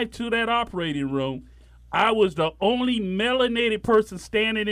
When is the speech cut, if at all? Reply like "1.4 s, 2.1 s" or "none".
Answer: none